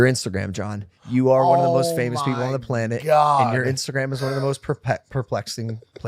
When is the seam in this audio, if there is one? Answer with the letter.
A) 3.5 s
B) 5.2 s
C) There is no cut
C